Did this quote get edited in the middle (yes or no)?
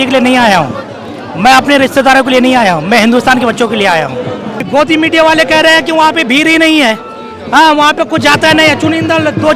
yes